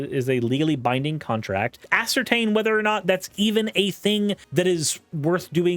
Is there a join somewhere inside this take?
yes; 2 cuts; at 1.8 s, 4.4 s

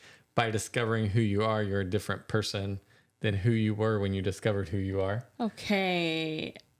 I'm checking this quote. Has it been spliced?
no; 0 cuts

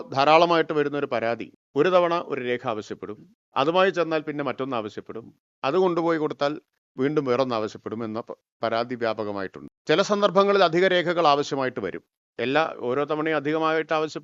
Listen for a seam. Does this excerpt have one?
no; 0 cuts

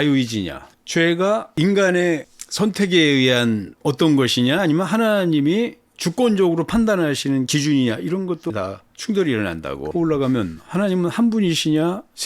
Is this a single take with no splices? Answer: no; 2 cuts; at 8.5 s, 9.9 s

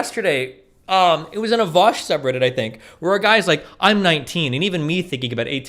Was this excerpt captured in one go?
yes; 0 cuts

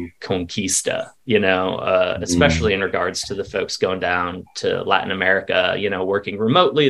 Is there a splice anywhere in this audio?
no; 0 cuts

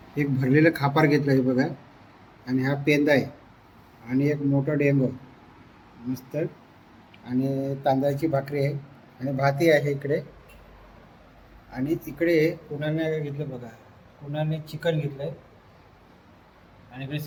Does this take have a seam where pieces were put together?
no; 0 cuts

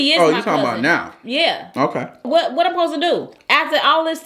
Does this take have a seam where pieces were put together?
yes; 2 cuts; at 2.3 s, 3.4 s

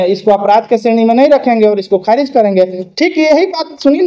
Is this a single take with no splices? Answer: yes; 0 cuts

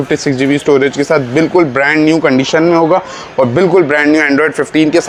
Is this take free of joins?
yes; 0 cuts

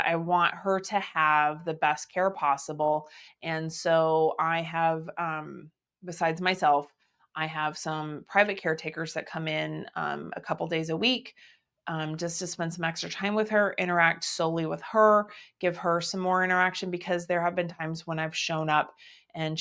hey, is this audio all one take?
yes; 0 cuts

